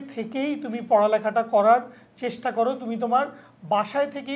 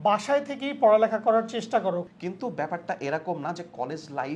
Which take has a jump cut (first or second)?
second